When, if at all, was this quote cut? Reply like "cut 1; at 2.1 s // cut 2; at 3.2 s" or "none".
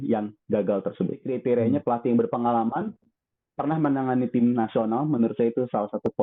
cut 1; at 1.3 s